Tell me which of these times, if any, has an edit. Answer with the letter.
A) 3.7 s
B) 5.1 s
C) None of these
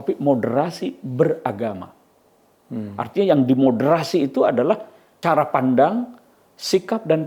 B